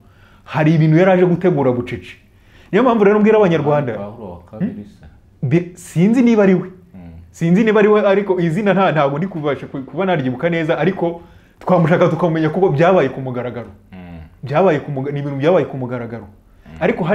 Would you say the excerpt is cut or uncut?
uncut